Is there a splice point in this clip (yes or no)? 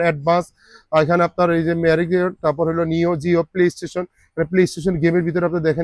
no